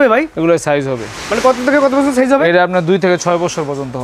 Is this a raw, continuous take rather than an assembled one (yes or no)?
yes